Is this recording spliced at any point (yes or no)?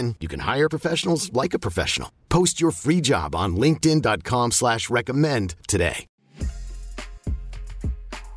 yes